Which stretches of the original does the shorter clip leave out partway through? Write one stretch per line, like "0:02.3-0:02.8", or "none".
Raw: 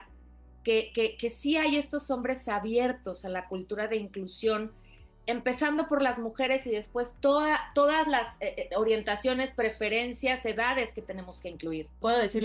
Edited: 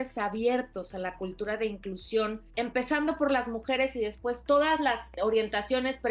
0:04.7-0:05.1
0:07.1-0:07.7
0:08.4-0:08.6

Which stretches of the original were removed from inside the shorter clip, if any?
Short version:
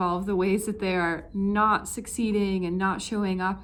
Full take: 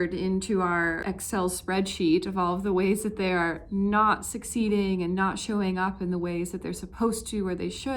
none

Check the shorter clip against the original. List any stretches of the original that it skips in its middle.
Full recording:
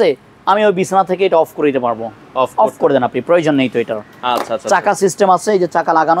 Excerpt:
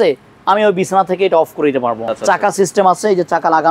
0:02.1-0:04.5

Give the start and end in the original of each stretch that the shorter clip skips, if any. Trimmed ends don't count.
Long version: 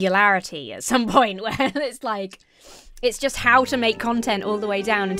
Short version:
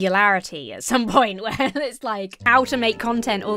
0:02.4-0:03.4

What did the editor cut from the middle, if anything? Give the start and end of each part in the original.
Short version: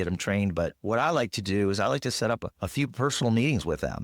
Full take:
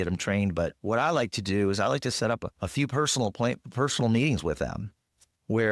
0:02.9-0:03.7

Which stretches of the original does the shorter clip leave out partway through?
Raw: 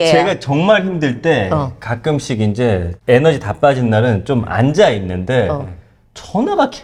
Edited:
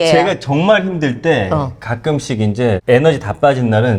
0:02.8-0:03.0

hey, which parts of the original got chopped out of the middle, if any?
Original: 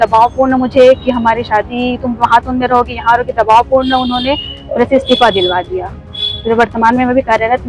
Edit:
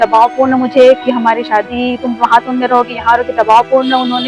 none

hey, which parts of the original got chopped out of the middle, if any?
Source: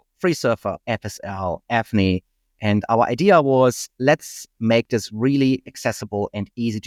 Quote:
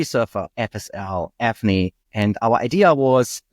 0:02.3-0:02.5

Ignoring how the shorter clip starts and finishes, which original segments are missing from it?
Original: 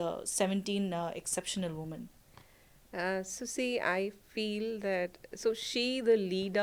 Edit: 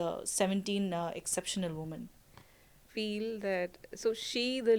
0:02.8-0:04.2

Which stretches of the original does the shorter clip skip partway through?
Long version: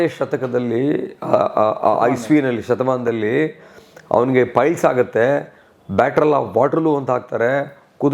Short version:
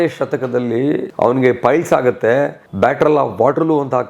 0:01.1-0:04.0
0:05.5-0:05.8

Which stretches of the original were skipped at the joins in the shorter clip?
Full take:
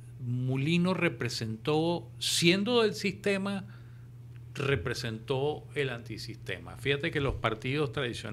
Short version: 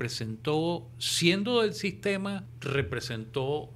0:03.7-0:04.5

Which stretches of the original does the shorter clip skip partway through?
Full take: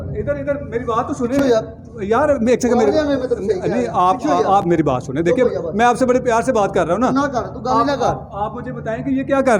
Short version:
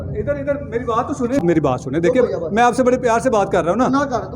0:01.4-0:04.6

